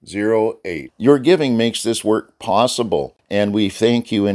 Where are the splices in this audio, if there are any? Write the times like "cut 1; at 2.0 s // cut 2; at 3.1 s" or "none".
cut 1; at 3.2 s